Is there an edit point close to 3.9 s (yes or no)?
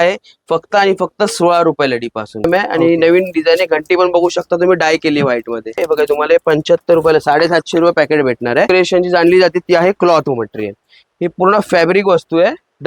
no